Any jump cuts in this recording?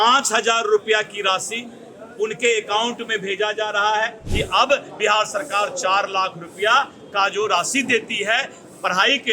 yes; 1 cut; at 4.2 s

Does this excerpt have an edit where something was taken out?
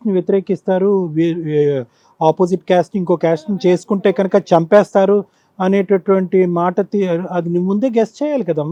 no; 0 cuts

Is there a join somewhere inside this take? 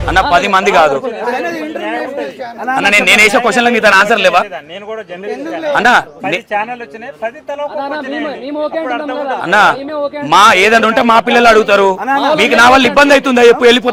no; 0 cuts

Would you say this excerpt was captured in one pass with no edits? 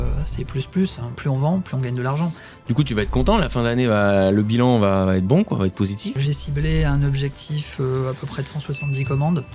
no; 2 cuts; at 2.5 s, 6.2 s

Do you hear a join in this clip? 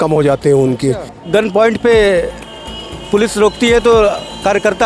yes; 1 cut; at 1.1 s

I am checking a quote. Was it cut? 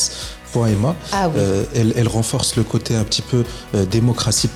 no; 0 cuts

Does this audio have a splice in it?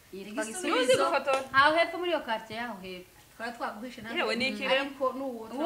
no; 0 cuts

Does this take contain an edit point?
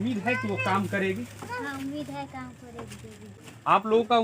yes; 1 cut; at 3.2 s

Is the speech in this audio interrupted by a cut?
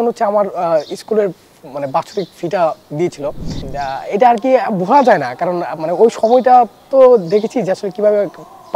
no; 0 cuts

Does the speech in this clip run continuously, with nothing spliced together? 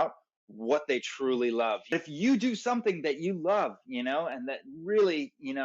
no; 1 cut; at 1.9 s

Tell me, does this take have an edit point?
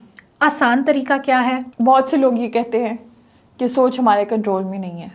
yes; 1 cut; at 1.7 s

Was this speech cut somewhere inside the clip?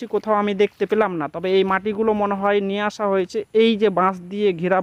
no; 0 cuts

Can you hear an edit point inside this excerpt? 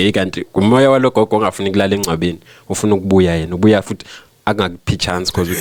no; 0 cuts

